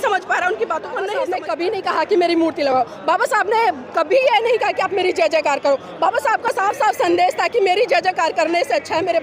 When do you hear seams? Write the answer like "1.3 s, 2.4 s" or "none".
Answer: 1.4 s